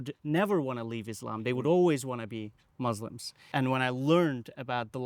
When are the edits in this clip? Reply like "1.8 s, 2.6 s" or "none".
3.4 s